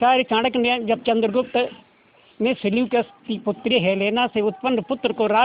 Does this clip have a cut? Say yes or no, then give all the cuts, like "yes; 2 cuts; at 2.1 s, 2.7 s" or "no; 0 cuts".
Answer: no; 0 cuts